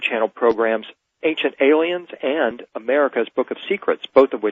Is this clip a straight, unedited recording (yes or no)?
yes